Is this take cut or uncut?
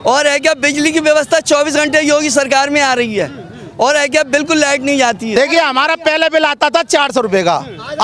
uncut